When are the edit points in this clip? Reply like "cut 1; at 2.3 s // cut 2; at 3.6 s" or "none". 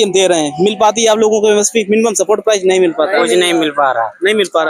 none